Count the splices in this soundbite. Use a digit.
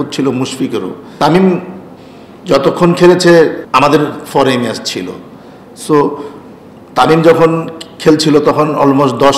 1